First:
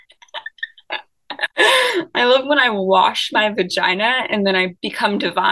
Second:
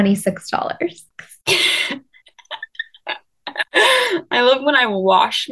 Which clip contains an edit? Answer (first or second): second